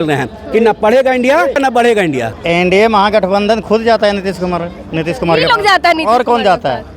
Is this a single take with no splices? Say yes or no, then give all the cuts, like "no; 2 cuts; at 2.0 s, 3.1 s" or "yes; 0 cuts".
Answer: no; 1 cut; at 2.3 s